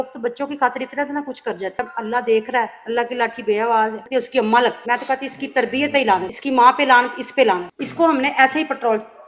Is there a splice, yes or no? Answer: yes